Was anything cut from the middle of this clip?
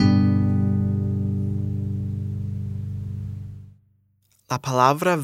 no; 0 cuts

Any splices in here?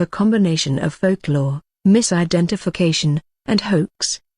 no; 0 cuts

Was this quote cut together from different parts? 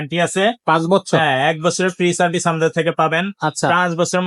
no; 0 cuts

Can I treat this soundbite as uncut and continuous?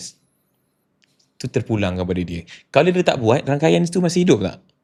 yes; 0 cuts

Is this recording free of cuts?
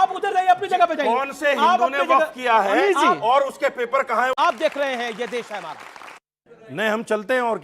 no; 1 cut; at 4.3 s

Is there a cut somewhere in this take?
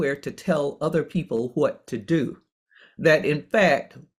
no; 0 cuts

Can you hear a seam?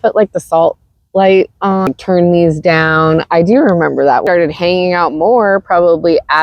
yes; 2 cuts; at 1.9 s, 4.2 s

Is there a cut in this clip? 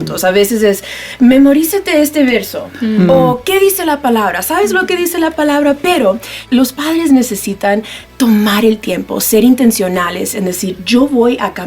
yes; 1 cut; at 6.4 s

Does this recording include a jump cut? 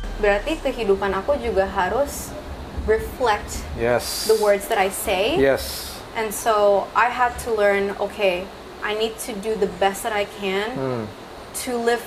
no; 0 cuts

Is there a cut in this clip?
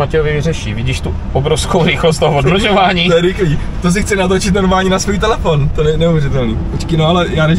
no; 0 cuts

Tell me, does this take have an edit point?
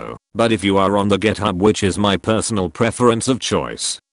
no; 0 cuts

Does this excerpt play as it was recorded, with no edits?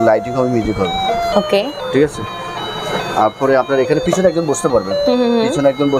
yes; 0 cuts

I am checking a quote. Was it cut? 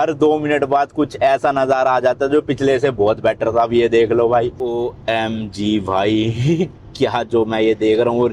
yes; 1 cut; at 4.6 s

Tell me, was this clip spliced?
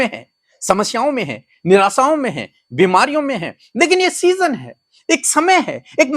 no; 0 cuts

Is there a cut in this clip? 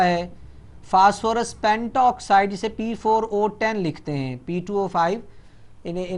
no; 0 cuts

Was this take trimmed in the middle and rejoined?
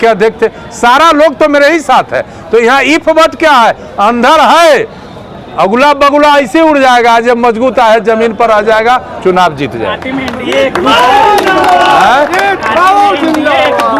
no; 0 cuts

